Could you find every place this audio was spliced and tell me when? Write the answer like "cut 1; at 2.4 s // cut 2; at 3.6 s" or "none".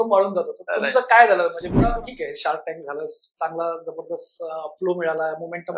cut 1; at 1.7 s